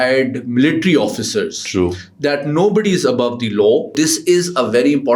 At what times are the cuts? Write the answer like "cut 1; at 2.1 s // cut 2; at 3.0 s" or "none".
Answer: cut 1; at 3.9 s